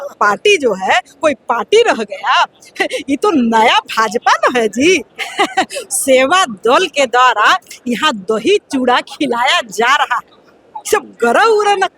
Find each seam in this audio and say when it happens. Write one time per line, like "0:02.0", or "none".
0:05.1